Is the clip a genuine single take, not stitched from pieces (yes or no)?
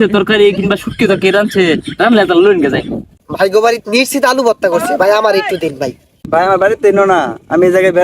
no